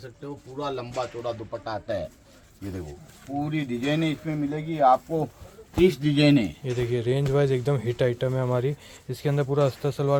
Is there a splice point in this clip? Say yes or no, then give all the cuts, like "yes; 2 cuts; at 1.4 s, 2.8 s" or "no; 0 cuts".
no; 0 cuts